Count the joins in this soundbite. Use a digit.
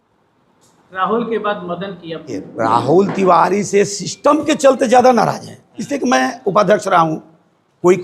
1